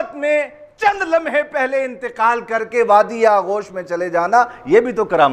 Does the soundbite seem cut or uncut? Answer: uncut